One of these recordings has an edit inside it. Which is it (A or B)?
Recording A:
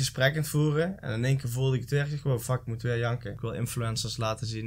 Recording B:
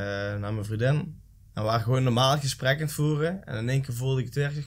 A